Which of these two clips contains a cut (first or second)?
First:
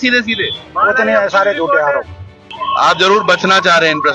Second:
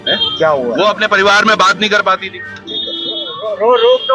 first